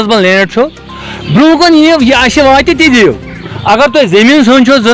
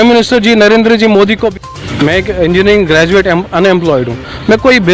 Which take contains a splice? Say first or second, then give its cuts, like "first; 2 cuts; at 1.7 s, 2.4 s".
second; 1 cut; at 1.5 s